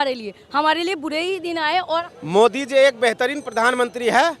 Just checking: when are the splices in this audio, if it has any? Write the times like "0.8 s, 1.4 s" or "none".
2.0 s